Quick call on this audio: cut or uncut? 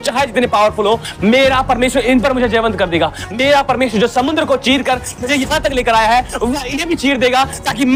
uncut